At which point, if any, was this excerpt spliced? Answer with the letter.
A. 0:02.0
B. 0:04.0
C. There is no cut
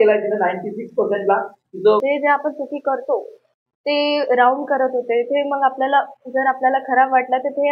A